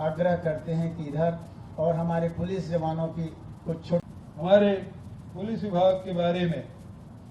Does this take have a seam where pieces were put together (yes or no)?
yes